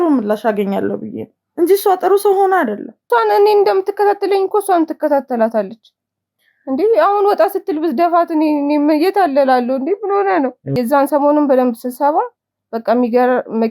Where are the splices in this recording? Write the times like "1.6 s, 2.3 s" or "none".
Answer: 3.0 s, 10.6 s